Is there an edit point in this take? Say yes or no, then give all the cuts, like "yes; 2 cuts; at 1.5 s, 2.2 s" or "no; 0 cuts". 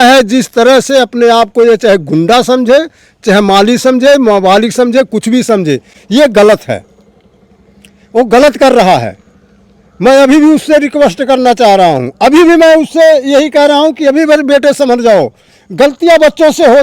no; 0 cuts